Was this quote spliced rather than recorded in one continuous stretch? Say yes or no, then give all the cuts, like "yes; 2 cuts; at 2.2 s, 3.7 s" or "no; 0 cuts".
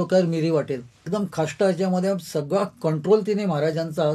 yes; 1 cut; at 1.0 s